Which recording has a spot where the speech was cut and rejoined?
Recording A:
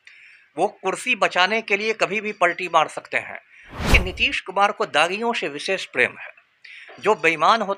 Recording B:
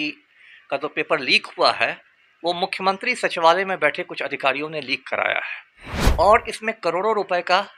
A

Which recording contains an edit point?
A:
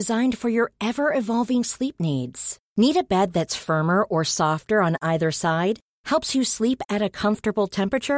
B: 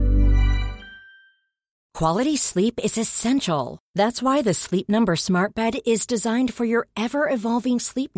B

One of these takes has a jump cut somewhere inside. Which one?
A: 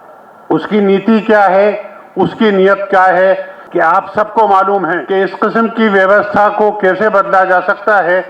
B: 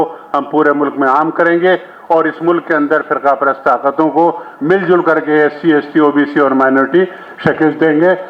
A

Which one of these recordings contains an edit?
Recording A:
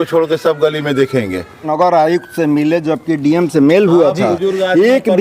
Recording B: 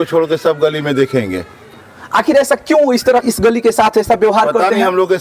A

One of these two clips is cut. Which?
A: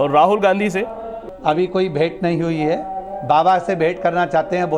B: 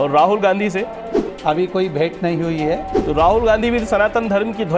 B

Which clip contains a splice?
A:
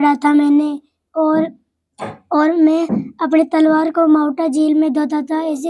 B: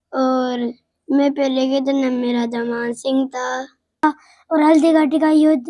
B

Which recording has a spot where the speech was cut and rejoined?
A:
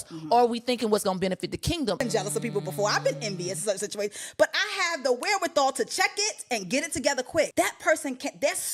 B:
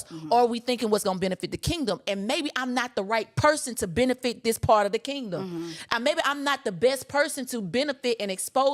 A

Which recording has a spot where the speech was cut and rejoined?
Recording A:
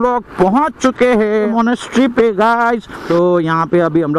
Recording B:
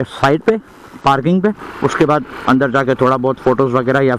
A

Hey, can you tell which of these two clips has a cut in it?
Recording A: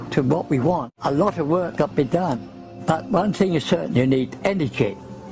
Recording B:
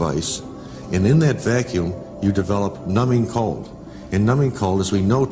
A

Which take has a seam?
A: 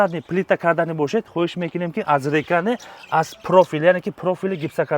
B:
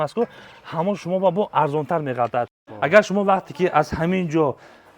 B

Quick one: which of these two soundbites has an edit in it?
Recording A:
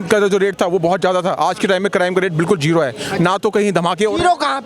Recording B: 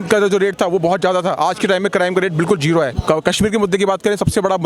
B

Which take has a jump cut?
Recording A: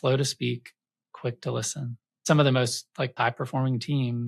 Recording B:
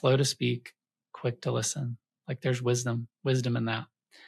A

